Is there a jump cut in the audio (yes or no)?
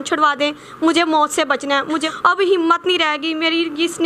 yes